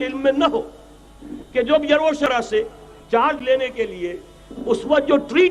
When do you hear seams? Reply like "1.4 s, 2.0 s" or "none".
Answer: 2.3 s